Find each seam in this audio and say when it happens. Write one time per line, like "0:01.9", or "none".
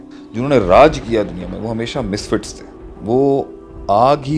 none